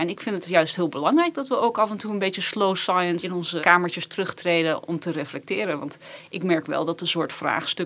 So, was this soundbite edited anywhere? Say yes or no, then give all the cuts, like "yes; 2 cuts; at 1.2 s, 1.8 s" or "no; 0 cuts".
yes; 1 cut; at 3.4 s